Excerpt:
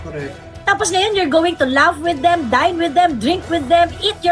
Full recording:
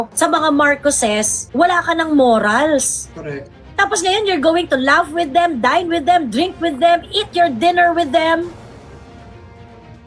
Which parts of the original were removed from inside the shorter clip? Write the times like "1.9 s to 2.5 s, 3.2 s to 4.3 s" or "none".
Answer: none

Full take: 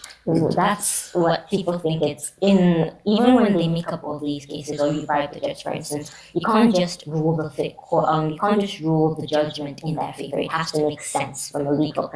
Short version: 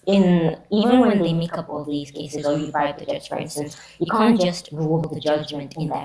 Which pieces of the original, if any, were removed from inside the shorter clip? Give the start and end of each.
7.4 s to 9.1 s

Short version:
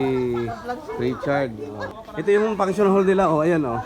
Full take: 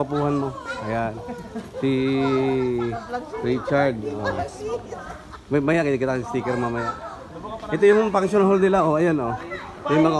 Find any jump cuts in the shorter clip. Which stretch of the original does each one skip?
4.3 s to 7.4 s

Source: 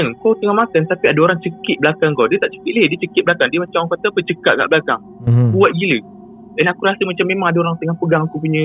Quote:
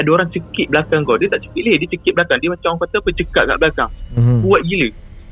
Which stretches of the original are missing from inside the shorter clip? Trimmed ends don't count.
none

